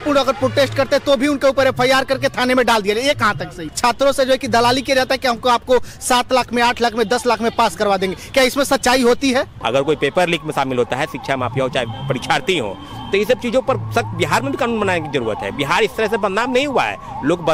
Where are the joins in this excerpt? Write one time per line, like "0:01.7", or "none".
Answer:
0:03.7
0:09.6